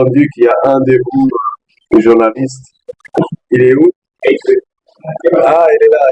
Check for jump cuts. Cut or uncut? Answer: cut